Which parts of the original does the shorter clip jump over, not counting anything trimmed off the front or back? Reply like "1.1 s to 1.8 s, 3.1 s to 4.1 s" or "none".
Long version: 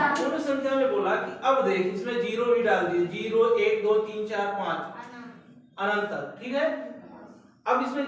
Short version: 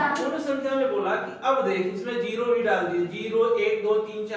none

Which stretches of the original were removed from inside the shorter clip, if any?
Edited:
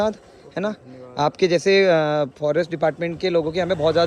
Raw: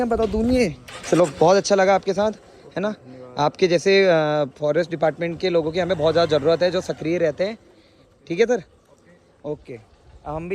none

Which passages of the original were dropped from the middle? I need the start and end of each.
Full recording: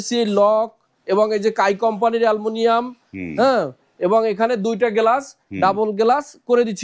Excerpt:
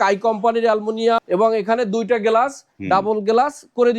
2.8 s to 3.9 s

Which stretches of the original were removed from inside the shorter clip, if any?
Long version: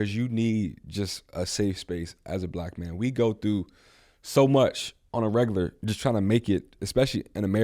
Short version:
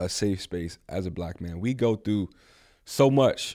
none

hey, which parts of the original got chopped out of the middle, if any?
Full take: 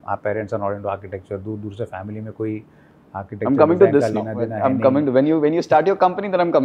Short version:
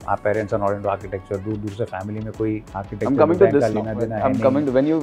2.7 s to 3.1 s

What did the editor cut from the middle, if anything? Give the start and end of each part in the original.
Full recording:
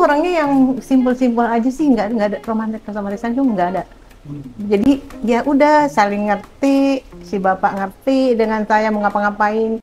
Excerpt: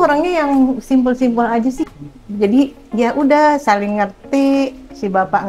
1.8 s to 4.1 s

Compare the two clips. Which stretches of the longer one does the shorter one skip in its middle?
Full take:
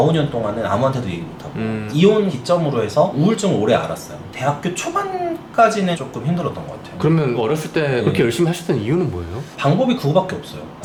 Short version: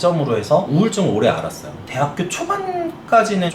none

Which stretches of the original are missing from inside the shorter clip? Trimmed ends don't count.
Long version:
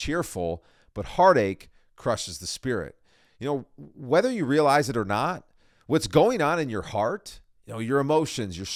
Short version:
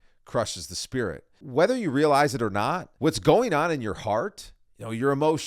3.0 s to 3.9 s, 5.4 s to 5.7 s

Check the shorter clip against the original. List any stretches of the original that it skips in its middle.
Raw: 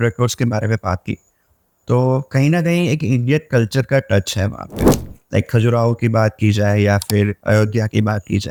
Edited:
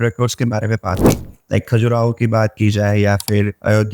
1.0 s to 4.8 s

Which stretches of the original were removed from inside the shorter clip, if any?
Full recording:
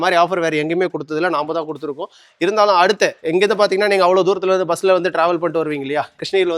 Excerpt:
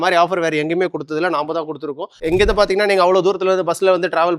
2.2 s to 3.2 s

